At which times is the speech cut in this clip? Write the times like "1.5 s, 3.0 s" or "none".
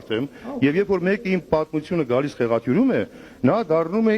none